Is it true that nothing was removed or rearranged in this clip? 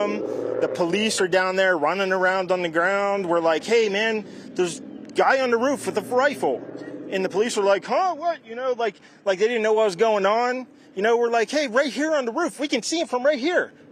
yes; 0 cuts

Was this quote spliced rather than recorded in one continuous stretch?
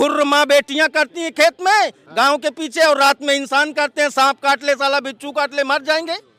no; 0 cuts

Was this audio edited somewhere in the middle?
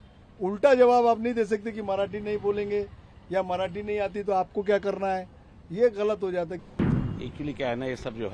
yes; 1 cut; at 6.8 s

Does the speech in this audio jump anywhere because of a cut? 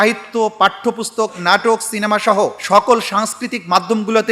no; 0 cuts

